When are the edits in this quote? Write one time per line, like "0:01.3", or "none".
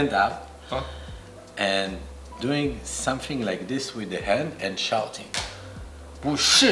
none